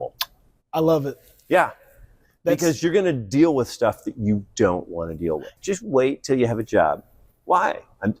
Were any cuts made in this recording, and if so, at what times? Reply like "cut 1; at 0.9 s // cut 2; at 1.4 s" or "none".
cut 1; at 5.5 s